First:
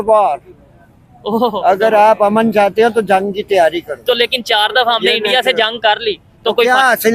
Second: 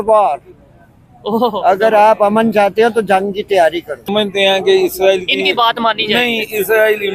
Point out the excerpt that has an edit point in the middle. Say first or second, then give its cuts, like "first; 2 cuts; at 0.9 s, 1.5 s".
second; 1 cut; at 4.1 s